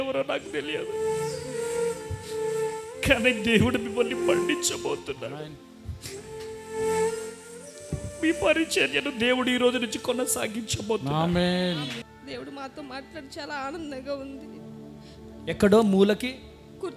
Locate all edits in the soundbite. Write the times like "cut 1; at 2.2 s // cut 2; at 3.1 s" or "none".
cut 1; at 12.0 s